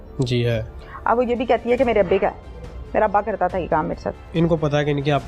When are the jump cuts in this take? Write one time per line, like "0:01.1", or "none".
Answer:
0:04.2